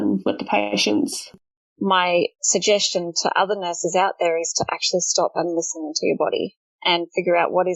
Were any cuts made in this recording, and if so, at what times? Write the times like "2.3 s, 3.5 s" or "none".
1.3 s, 2.4 s